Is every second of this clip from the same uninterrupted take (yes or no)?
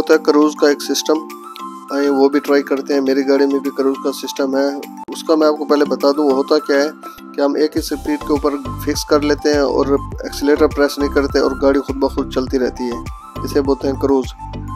yes